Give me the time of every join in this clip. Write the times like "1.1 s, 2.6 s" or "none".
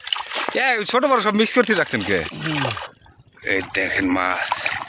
2.9 s